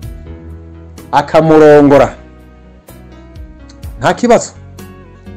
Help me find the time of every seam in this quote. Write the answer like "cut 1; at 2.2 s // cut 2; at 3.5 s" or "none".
none